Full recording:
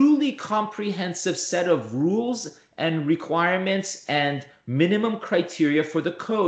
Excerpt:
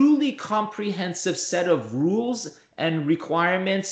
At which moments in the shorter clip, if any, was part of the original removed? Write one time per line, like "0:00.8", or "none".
none